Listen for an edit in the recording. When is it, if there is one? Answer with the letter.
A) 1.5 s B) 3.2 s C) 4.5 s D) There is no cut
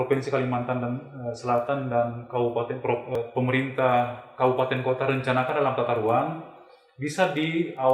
B